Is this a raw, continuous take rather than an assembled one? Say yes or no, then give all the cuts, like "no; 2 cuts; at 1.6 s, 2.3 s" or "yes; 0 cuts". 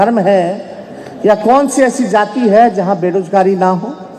yes; 0 cuts